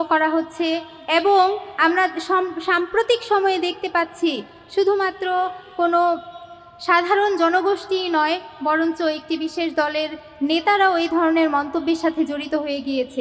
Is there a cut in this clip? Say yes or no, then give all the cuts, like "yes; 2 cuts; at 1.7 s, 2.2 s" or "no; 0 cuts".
no; 0 cuts